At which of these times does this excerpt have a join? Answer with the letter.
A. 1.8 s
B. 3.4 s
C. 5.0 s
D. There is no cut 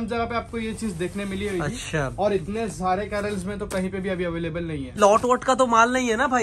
C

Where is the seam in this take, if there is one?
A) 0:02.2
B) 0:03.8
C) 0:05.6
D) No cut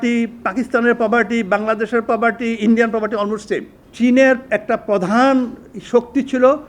B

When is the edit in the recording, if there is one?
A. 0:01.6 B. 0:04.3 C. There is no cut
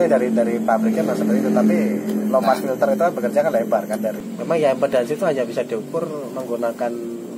B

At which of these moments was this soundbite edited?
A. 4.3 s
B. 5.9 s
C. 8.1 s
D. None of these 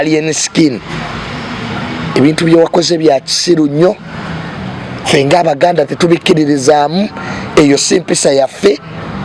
D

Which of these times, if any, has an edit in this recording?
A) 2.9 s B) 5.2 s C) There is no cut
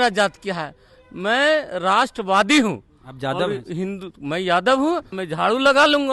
B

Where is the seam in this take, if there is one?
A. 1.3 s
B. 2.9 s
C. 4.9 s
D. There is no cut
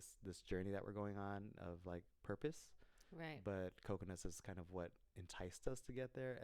D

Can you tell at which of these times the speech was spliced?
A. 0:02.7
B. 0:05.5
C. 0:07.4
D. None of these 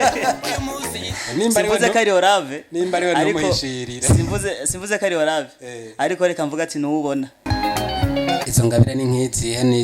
C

